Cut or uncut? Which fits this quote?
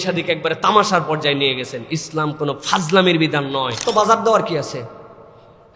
cut